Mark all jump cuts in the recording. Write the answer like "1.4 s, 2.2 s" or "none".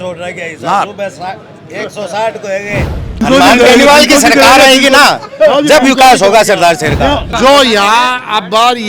3.2 s, 7.3 s